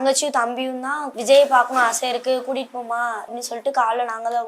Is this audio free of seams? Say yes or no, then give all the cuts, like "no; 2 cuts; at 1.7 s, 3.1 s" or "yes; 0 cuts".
no; 2 cuts; at 1.1 s, 3.3 s